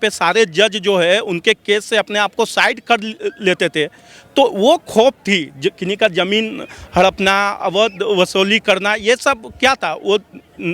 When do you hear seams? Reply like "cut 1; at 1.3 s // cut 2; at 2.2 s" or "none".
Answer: none